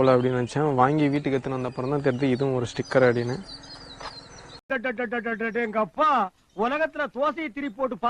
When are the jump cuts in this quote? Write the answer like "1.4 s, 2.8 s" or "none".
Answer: 4.6 s